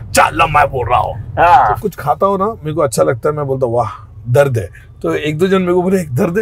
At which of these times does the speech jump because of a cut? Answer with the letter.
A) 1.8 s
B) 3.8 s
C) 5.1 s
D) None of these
A